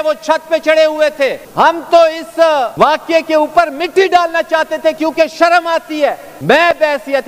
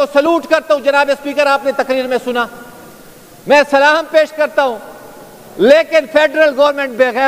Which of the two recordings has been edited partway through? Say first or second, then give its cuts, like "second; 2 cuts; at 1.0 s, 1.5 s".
first; 3 cuts; at 1.4 s, 2.7 s, 6.3 s